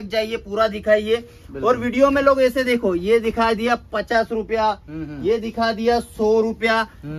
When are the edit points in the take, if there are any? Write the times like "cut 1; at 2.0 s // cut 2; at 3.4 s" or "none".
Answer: none